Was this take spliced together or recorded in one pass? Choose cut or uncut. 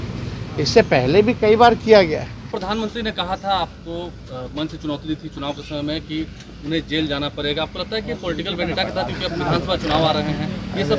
cut